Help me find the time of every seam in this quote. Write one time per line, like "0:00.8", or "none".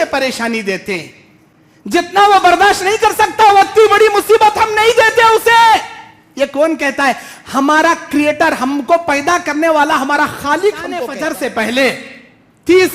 0:11.1